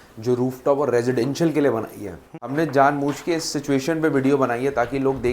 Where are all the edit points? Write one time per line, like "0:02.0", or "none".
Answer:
0:02.3